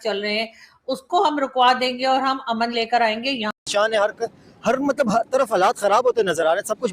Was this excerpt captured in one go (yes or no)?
no